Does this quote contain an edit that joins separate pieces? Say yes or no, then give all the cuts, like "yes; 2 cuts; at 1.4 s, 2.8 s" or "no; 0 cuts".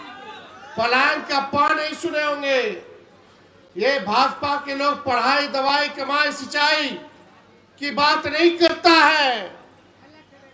no; 0 cuts